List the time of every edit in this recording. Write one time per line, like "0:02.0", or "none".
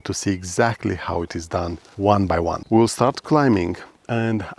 0:02.6